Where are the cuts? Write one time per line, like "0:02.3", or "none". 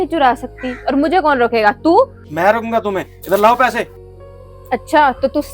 0:02.2
0:04.0